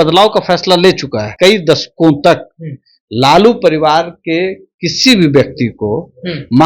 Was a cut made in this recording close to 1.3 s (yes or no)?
yes